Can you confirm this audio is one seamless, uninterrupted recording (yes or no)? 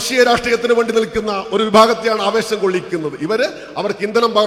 yes